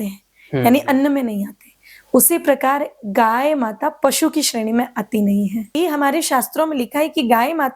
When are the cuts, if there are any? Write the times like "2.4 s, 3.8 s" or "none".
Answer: 5.8 s

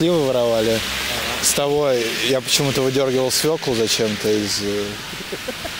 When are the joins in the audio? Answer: none

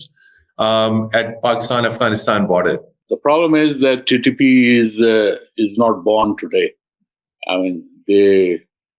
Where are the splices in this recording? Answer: 2.9 s

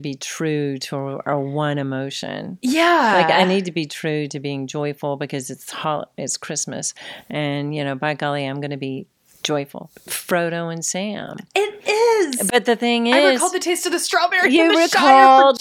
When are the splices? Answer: 9.8 s

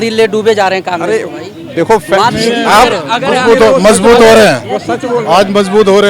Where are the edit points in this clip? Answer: none

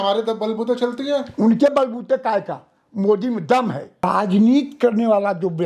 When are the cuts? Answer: 4.0 s

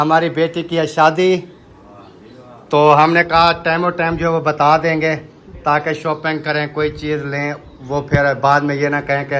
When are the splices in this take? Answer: none

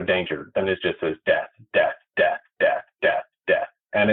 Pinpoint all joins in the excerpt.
none

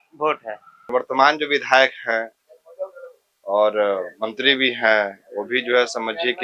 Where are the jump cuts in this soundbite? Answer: 0.9 s

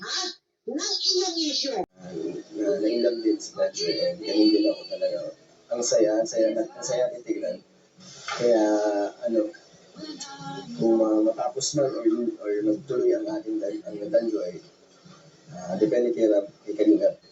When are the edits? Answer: 2.0 s

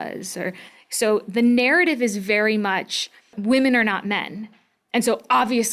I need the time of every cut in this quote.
3.4 s

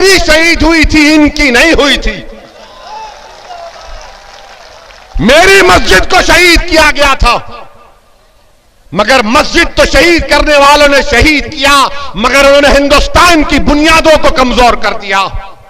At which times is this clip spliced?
none

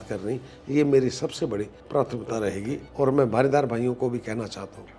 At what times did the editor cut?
1.8 s, 2.8 s

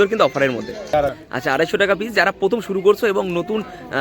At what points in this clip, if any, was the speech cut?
1.2 s

